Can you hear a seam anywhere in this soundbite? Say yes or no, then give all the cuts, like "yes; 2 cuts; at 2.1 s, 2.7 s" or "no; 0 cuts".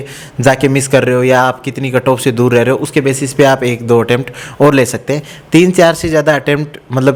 no; 0 cuts